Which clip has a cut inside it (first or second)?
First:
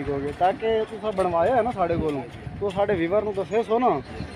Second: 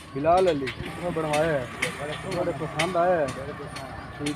second